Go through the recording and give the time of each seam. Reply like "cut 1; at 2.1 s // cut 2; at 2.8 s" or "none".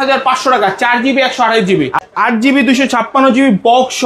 cut 1; at 2.0 s